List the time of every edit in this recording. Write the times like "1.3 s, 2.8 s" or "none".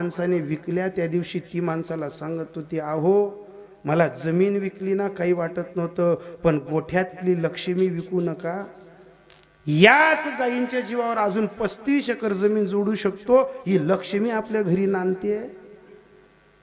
none